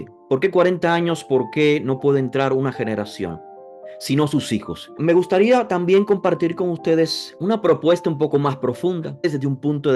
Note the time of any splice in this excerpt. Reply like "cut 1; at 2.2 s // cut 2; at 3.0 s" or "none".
cut 1; at 5.0 s // cut 2; at 7.3 s // cut 3; at 9.2 s